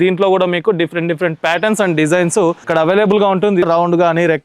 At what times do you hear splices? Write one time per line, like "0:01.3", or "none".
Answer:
0:02.6
0:03.6